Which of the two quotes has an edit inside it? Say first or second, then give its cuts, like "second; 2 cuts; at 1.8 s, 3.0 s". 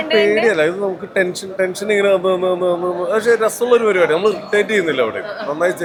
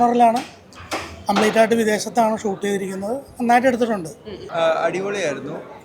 second; 1 cut; at 4.4 s